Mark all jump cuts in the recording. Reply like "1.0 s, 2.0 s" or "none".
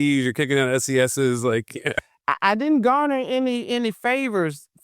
2.0 s

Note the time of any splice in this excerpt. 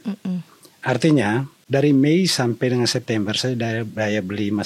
1.6 s

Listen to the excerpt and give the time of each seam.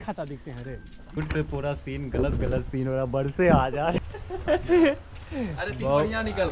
1.2 s, 4.0 s

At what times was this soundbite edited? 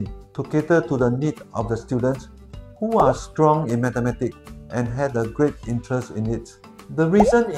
6.6 s

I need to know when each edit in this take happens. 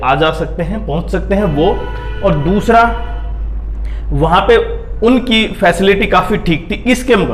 none

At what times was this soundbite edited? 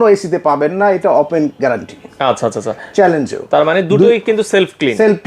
none

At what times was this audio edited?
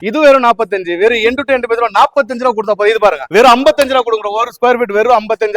none

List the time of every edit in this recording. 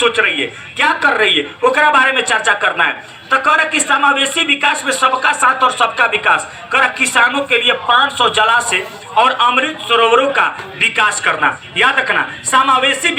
none

